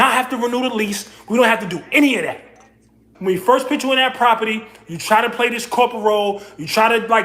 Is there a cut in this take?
yes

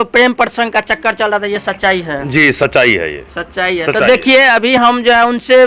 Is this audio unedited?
yes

